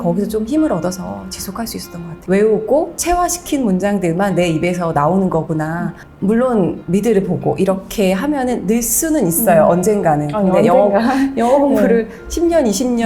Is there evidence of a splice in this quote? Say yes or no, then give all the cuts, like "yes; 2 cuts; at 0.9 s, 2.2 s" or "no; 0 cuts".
yes; 3 cuts; at 2.1 s, 6.0 s, 6.8 s